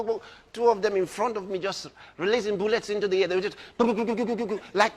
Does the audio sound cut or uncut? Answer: uncut